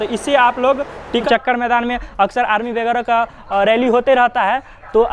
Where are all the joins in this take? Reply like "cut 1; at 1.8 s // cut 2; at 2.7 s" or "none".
cut 1; at 1.1 s